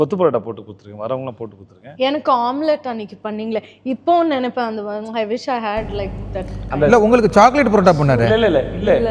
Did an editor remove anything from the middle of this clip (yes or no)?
no